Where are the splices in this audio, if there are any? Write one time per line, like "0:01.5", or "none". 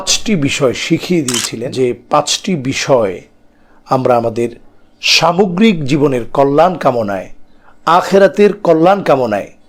0:01.6

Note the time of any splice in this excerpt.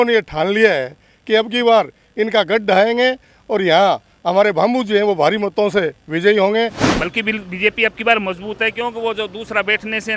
0:06.8

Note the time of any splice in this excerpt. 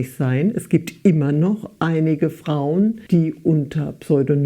0:03.0

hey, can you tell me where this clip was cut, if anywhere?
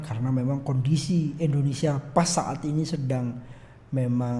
none

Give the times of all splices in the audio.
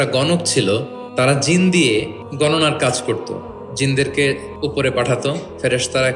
0:01.0
0:01.8
0:04.5

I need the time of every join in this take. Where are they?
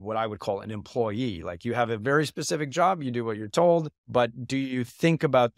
0:04.0

